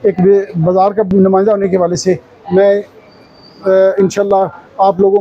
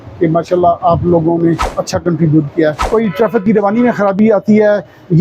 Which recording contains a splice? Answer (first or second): second